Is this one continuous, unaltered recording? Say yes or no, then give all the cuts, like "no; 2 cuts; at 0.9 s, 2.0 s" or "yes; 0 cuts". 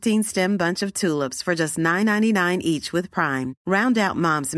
yes; 0 cuts